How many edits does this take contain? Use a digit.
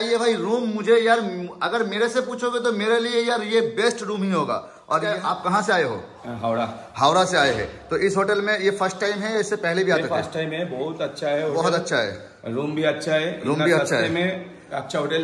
1